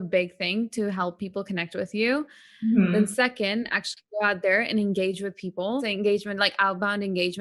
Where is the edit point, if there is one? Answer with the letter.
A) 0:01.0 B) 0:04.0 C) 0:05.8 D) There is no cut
C